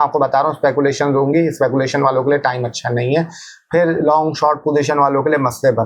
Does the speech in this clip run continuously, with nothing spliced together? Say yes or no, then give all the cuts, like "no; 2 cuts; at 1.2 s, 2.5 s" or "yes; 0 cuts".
yes; 0 cuts